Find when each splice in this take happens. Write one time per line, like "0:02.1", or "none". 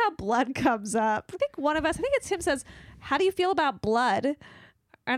0:01.4